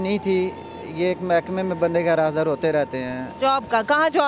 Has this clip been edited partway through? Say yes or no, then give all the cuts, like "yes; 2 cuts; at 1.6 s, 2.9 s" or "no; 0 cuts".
yes; 1 cut; at 3.3 s